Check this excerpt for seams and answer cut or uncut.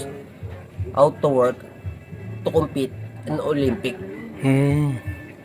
uncut